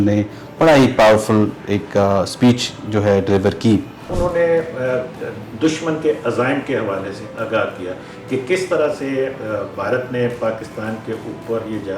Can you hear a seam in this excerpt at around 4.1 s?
yes; 1 cut; at 4.1 s

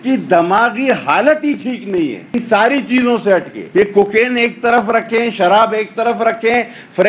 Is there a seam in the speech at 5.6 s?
no; 2 cuts; at 2.3 s, 3.6 s

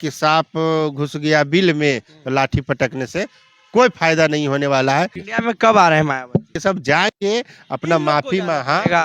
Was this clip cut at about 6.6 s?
yes; 2 cuts; at 5.2 s, 6.6 s

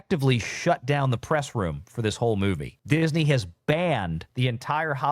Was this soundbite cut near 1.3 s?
no; 2 cuts; at 2.7 s, 4.2 s

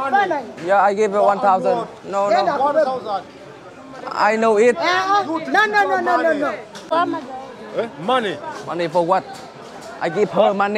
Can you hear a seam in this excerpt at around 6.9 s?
yes; 1 cut; at 6.9 s

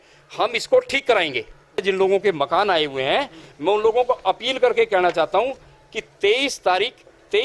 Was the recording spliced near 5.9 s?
no; 1 cut; at 1.8 s

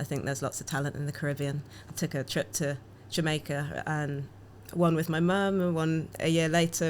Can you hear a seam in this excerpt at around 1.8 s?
no; 0 cuts

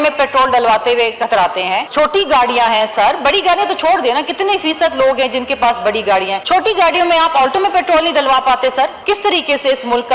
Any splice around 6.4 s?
yes; 3 cuts; at 1.9 s, 6.4 s, 9.0 s

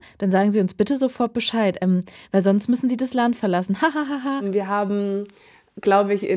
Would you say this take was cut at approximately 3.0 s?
no; 1 cut; at 4.5 s

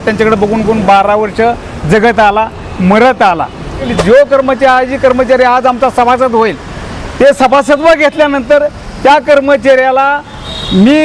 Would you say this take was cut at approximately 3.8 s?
yes; 1 cut; at 3.8 s

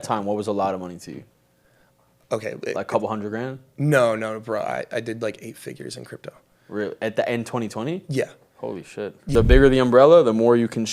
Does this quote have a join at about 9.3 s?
yes; 1 cut; at 9.3 s

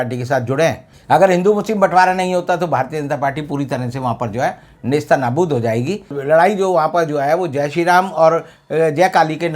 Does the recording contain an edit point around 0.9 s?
yes; 2 cuts; at 0.9 s, 6.1 s

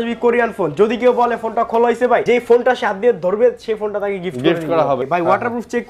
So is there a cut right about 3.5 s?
no; 2 cuts; at 2.2 s, 5.0 s

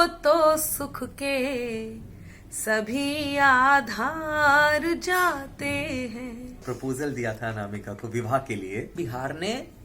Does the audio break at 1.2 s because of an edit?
no; 2 cuts; at 6.6 s, 8.9 s

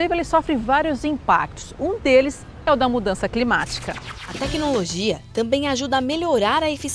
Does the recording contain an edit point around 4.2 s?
yes; 1 cut; at 4.2 s

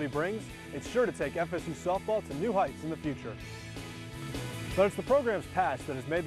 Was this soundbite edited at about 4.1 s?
yes; 1 cut; at 4.1 s

